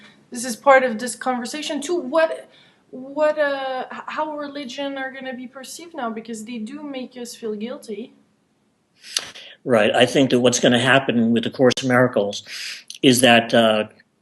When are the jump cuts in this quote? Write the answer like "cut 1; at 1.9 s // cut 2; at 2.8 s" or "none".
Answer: none